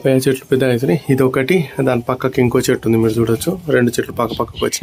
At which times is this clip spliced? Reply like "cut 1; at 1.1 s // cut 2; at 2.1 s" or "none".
none

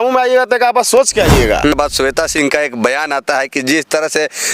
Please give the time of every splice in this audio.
cut 1; at 1.7 s

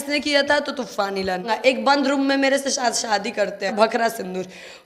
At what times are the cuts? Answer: cut 1; at 1.5 s // cut 2; at 3.7 s

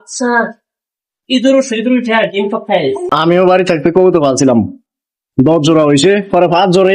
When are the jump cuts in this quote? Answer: cut 1; at 3.1 s

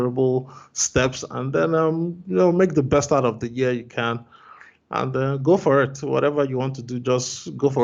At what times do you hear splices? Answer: none

